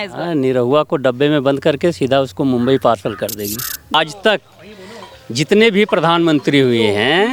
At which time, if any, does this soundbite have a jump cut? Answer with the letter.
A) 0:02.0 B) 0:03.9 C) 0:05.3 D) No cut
B